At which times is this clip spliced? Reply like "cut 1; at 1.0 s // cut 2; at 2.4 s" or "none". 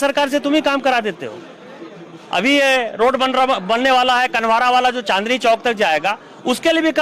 none